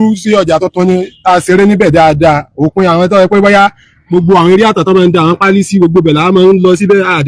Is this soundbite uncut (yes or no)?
yes